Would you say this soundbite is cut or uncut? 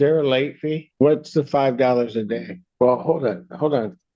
cut